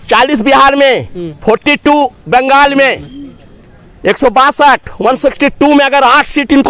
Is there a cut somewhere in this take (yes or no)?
no